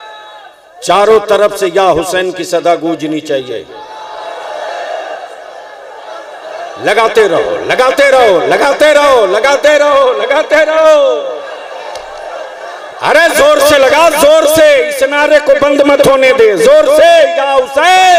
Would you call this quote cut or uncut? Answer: uncut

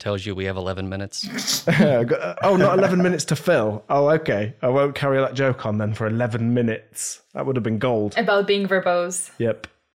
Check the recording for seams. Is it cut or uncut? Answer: uncut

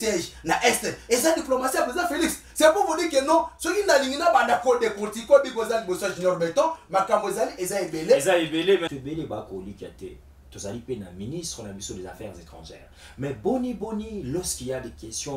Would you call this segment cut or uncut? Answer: cut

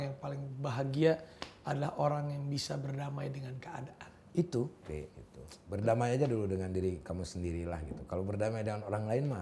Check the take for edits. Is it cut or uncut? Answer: uncut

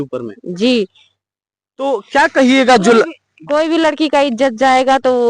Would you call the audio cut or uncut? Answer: uncut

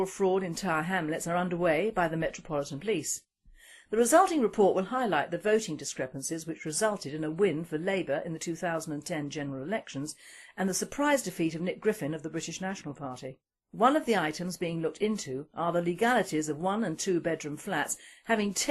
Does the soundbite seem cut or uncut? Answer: uncut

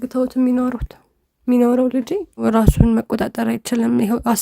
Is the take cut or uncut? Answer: cut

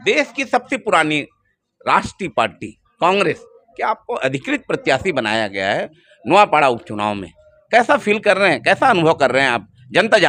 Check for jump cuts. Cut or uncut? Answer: uncut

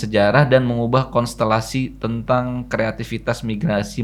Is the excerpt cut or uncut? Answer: uncut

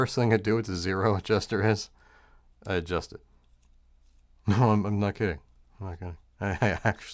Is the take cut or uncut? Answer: uncut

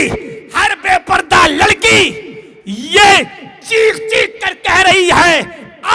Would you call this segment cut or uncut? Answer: uncut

